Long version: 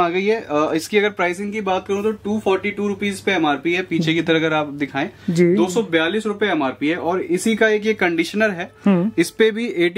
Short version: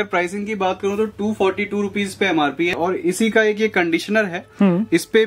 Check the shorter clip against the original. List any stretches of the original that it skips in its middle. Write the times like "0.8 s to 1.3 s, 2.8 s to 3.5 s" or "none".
3.8 s to 7.0 s